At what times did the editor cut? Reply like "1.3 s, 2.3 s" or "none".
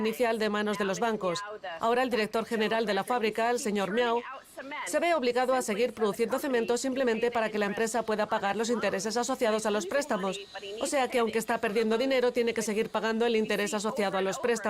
10.0 s